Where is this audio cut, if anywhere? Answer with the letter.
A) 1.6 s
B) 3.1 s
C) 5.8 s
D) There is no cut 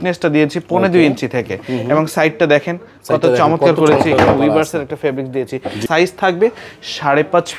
C